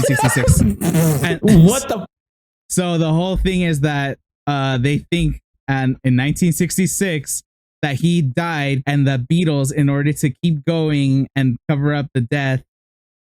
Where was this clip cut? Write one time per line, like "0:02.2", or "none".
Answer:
0:08.8